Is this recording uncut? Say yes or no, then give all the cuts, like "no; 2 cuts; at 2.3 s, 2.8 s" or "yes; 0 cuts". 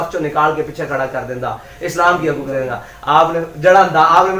yes; 0 cuts